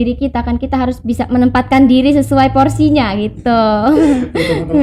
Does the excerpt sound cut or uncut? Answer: uncut